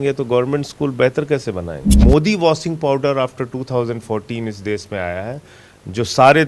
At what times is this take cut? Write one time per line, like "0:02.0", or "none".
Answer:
0:02.0